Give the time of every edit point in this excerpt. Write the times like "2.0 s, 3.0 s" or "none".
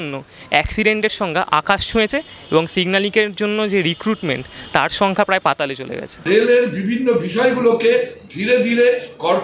1.5 s, 6.3 s